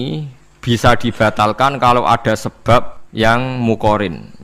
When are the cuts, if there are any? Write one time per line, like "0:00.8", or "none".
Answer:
0:03.0

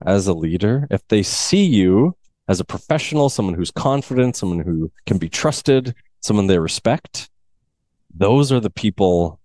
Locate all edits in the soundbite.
0:02.3

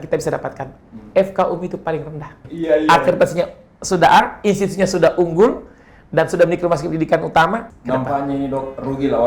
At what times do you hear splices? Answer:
0:02.4
0:07.7

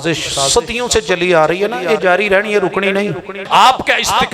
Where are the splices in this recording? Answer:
0:03.4

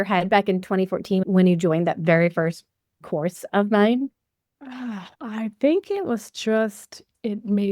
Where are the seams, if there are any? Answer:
0:05.1

